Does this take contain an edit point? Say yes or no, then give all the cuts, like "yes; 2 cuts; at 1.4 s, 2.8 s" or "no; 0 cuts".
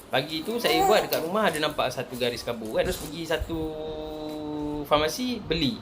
yes; 1 cut; at 2.9 s